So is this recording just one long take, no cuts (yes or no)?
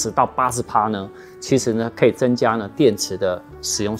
yes